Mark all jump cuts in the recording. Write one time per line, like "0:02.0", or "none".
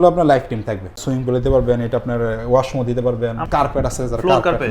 0:01.0
0:03.4